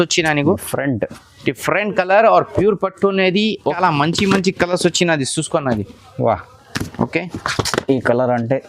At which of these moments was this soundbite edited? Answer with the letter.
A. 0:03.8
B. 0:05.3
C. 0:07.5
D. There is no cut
A